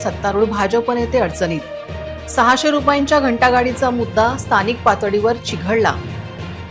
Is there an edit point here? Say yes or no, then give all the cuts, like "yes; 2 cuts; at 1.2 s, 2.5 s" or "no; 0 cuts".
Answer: no; 0 cuts